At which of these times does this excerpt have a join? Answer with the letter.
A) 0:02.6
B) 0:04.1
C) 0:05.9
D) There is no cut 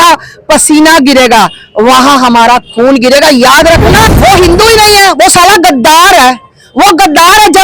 B